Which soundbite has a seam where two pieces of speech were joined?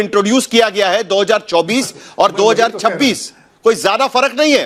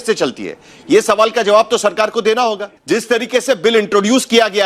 second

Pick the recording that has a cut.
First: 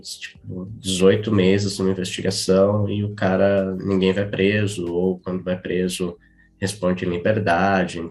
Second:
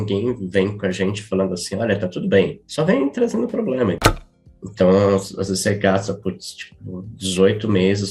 second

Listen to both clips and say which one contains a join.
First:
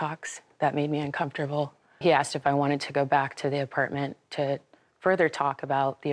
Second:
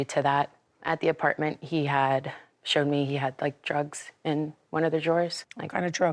first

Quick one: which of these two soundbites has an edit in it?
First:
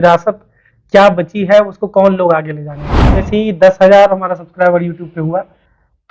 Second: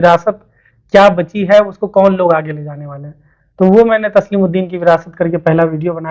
first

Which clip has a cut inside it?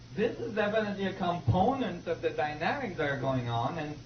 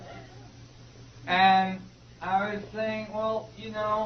first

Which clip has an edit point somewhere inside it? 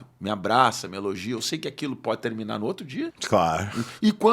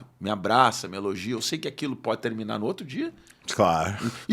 first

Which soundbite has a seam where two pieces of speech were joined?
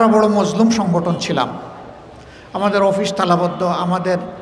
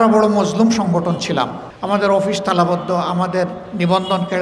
second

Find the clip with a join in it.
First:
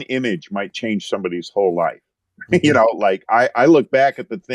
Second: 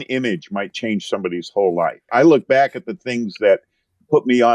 second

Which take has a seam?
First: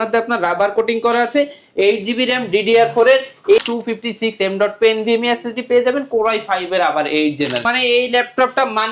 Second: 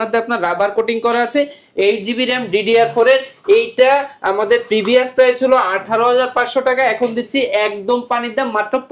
first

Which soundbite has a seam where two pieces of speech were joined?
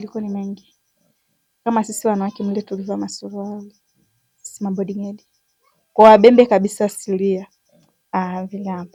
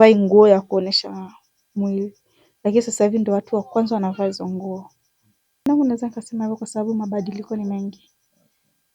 second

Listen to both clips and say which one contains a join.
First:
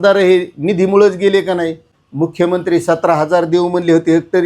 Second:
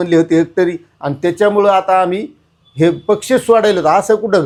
first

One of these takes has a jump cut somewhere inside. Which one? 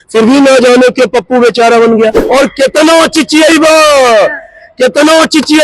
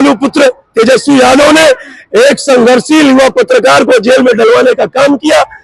first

